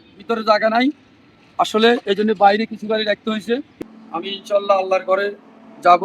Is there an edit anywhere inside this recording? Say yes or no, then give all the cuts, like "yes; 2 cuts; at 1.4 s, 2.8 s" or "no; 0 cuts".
yes; 1 cut; at 3.7 s